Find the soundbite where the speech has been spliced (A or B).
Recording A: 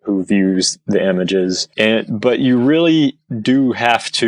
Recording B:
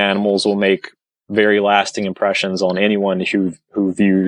A